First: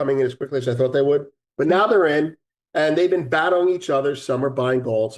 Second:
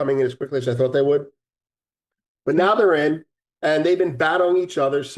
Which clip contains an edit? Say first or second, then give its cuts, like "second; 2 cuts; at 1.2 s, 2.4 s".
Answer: first; 1 cut; at 1.4 s